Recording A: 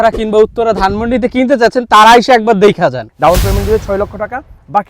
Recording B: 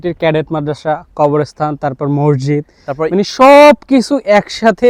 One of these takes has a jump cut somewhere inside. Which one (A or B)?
A